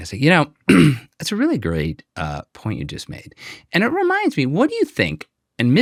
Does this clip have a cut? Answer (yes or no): no